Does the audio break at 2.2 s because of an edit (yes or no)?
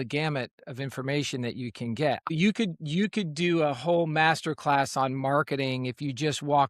yes